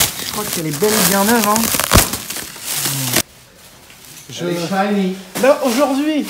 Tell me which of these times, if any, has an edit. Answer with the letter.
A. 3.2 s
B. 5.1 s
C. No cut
A